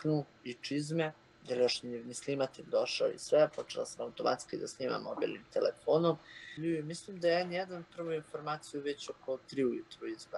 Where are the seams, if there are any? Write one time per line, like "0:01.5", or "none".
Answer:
0:01.3
0:06.6